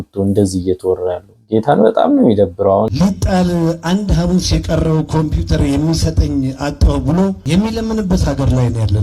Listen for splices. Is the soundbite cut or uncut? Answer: cut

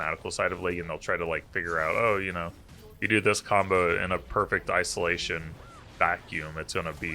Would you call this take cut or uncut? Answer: uncut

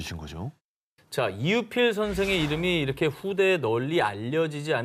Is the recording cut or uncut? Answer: uncut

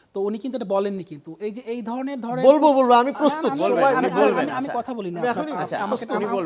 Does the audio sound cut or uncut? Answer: uncut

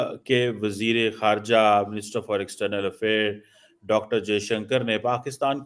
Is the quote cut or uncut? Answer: uncut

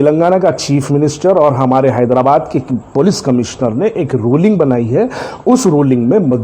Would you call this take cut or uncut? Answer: uncut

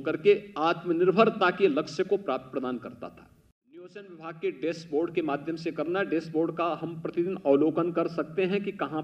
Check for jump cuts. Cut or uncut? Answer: cut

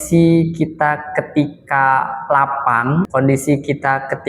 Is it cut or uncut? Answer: cut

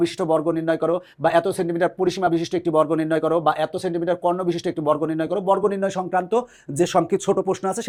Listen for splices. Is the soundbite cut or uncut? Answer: uncut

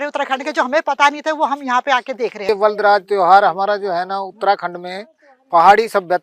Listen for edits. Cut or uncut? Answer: cut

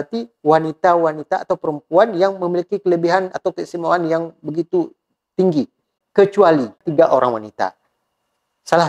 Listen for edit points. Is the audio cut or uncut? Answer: cut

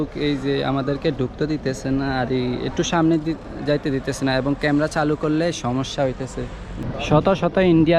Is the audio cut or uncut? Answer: cut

